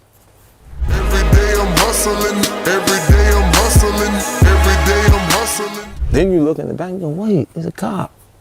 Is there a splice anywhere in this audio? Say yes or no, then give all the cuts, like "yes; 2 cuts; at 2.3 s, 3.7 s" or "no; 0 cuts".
no; 0 cuts